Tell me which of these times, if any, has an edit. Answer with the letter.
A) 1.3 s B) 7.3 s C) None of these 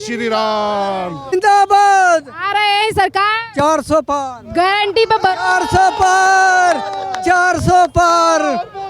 A